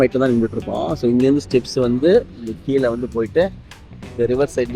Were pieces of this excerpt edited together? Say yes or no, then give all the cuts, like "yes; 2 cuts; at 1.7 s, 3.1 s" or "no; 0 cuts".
no; 0 cuts